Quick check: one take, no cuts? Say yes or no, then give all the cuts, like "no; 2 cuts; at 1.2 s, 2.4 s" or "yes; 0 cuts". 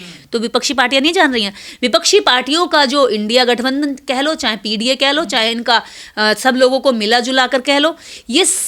yes; 0 cuts